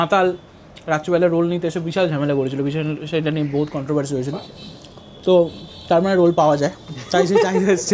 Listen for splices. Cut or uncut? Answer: uncut